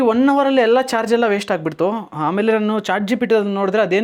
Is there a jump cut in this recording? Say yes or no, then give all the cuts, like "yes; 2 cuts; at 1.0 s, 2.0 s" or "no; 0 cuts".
no; 0 cuts